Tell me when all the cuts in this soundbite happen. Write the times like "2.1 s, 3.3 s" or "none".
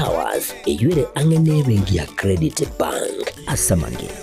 none